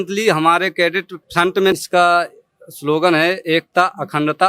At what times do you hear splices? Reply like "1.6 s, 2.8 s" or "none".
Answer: 1.7 s